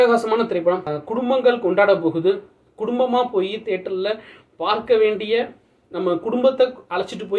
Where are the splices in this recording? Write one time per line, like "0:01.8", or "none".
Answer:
0:00.9